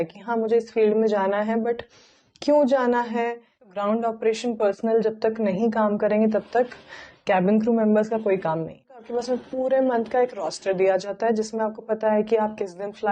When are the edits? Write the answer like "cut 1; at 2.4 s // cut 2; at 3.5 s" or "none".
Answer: cut 1; at 3.7 s // cut 2; at 9.1 s

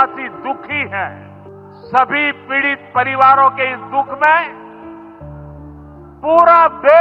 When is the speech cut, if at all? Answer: cut 1; at 1.7 s

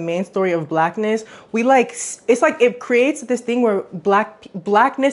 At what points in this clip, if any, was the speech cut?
none

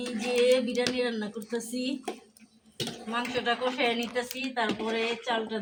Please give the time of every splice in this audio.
none

